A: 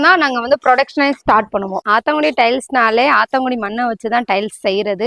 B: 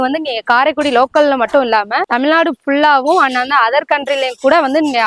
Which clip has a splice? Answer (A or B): A